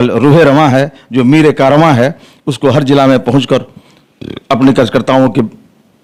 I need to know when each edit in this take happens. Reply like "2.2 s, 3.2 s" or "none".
none